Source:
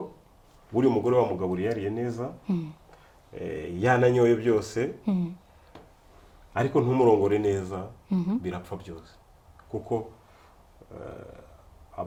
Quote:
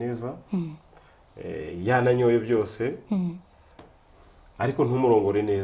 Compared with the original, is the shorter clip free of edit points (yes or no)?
yes